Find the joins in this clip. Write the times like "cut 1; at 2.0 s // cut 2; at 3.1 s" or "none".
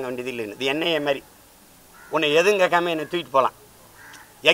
none